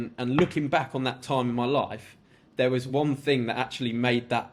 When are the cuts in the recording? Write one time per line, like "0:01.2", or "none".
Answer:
none